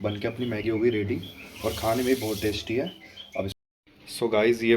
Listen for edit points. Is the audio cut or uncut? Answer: cut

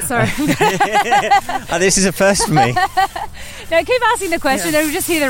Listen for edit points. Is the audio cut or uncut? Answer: uncut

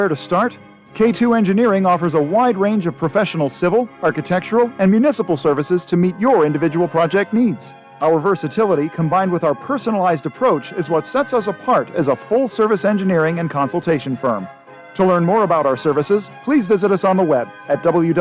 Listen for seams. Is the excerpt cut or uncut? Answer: uncut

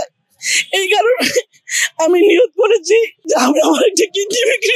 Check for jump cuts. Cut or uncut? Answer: cut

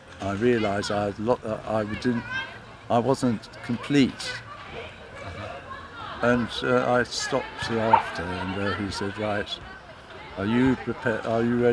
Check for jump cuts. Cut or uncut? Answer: uncut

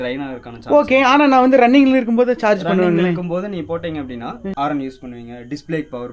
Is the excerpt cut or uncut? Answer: cut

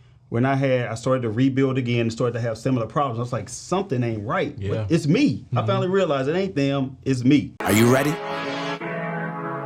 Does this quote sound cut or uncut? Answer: cut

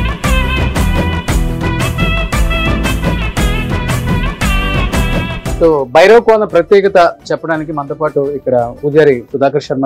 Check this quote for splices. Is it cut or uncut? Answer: uncut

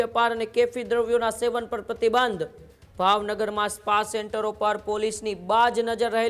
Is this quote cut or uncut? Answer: uncut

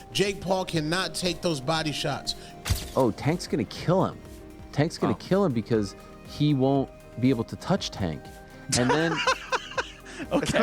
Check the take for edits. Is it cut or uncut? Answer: cut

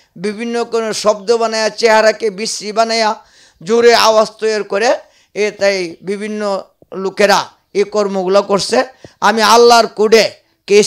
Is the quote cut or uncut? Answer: uncut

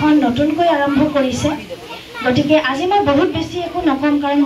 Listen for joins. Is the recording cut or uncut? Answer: uncut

